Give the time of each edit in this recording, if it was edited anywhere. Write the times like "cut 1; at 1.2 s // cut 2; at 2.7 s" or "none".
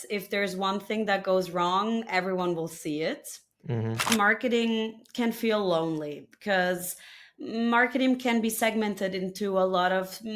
cut 1; at 4.1 s